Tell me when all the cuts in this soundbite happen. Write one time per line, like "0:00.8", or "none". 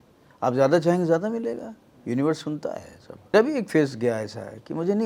0:03.3

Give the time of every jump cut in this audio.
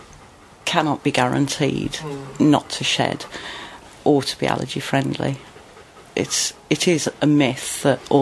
0:03.9
0:05.5

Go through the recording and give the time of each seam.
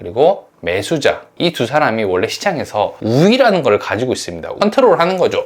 0:01.3
0:04.5

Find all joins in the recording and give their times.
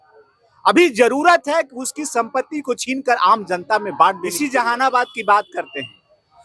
0:04.4

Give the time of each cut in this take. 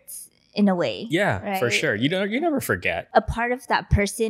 0:03.0

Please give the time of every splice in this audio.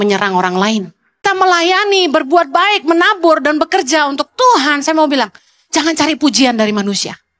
0:01.2

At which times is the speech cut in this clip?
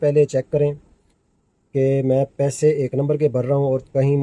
none

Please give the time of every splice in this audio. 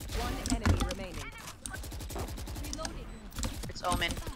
0:01.6

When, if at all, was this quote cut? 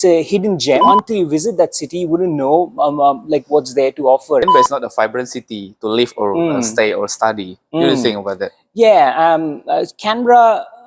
0:00.8
0:04.5

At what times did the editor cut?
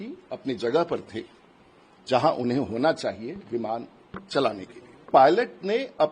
0:05.1

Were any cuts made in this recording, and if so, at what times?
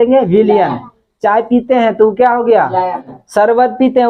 0:03.2

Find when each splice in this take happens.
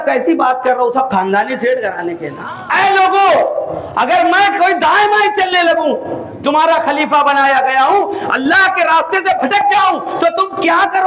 0:02.3

